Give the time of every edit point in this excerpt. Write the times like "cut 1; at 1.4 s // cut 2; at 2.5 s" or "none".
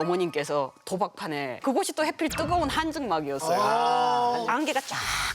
cut 1; at 1.6 s